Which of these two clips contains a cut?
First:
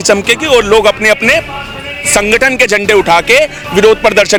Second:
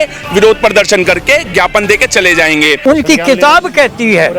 second; 1 cut; at 2.8 s

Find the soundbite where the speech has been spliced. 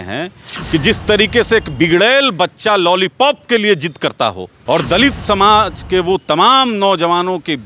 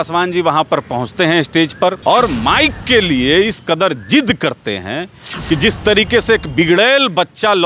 first; 1 cut; at 4.5 s

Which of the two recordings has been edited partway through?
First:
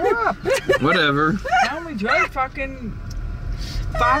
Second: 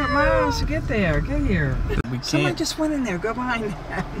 second; 1 cut; at 2.0 s

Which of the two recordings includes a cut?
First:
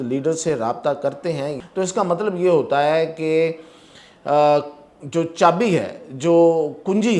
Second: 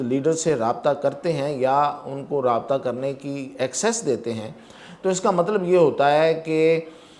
first; 1 cut; at 1.6 s

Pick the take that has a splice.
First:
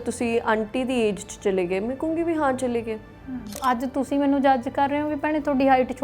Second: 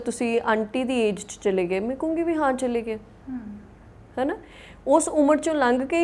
first; 1 cut; at 3.6 s

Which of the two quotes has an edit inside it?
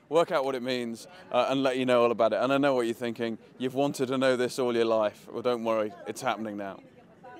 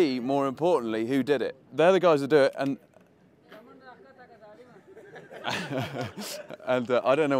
first; 1 cut; at 4.5 s

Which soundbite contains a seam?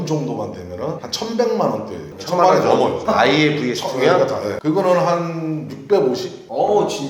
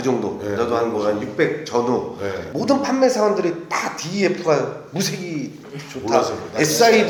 first; 3 cuts; at 1.1 s, 3.0 s, 4.6 s

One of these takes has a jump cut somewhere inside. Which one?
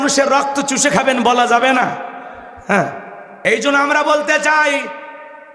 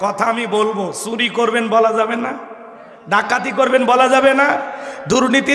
first; 1 cut; at 3.3 s

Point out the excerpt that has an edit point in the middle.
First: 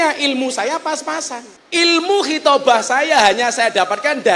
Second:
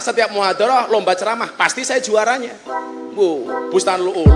first; 1 cut; at 1.5 s

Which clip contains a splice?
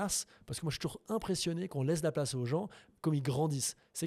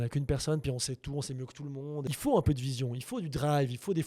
second; 1 cut; at 2.1 s

